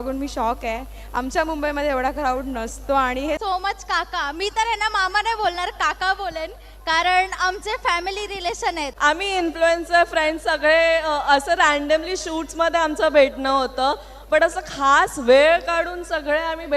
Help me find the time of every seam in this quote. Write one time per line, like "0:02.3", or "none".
0:03.4
0:08.9